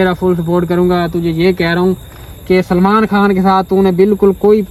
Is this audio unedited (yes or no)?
yes